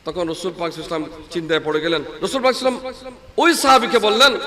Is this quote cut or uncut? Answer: cut